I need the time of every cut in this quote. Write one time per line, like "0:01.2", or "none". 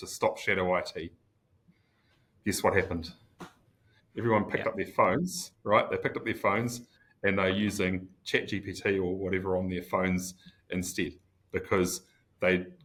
none